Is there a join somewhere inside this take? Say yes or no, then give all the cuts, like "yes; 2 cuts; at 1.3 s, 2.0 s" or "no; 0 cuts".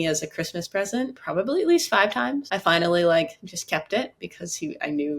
yes; 2 cuts; at 1.2 s, 2.5 s